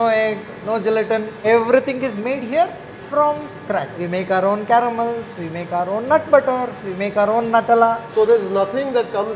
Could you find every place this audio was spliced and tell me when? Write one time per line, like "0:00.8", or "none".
0:01.4
0:03.9
0:08.1